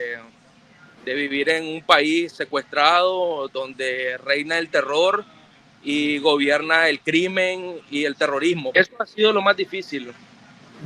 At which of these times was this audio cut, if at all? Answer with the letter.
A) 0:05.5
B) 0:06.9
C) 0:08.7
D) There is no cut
C